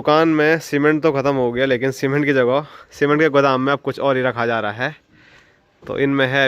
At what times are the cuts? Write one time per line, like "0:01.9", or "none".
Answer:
none